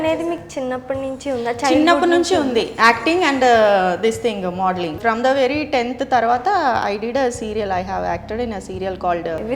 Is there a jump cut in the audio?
yes; 1 cut; at 5.0 s

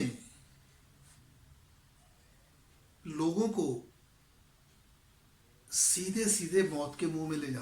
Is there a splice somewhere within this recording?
no; 0 cuts

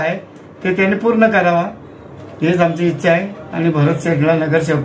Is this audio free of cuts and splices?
yes; 0 cuts

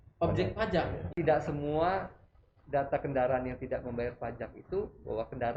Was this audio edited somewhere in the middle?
yes; 1 cut; at 1.1 s

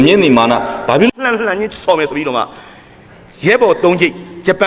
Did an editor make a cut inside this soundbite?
yes; 1 cut; at 1.1 s

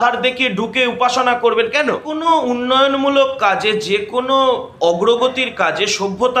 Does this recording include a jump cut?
yes; 1 cut; at 2.1 s

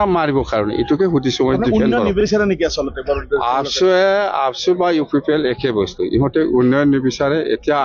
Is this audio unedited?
yes; 0 cuts

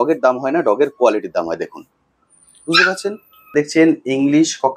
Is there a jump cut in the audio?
yes; 1 cut; at 3.5 s

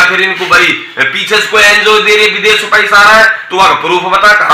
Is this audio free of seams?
yes; 0 cuts

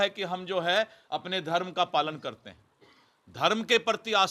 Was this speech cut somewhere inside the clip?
no; 0 cuts

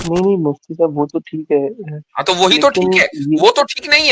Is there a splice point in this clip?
no; 0 cuts

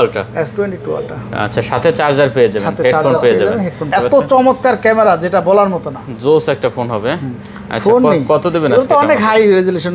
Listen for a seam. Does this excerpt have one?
yes; 1 cut; at 3.9 s

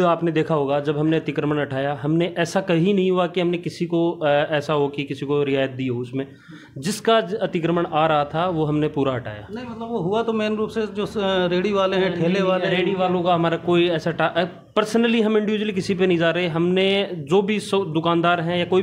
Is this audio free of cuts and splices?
yes; 0 cuts

